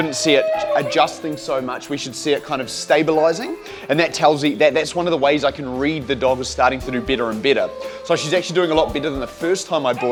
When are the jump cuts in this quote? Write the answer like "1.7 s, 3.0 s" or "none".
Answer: none